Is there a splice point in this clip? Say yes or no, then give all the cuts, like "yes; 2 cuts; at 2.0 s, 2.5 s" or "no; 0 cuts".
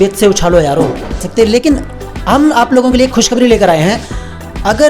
yes; 1 cut; at 1.3 s